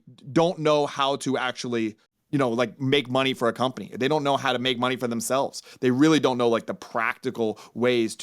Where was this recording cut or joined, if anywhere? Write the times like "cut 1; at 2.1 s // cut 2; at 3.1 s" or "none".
cut 1; at 2.1 s